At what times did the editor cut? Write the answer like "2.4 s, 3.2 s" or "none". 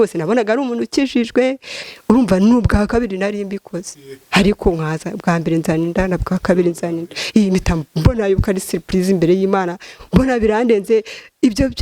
1.8 s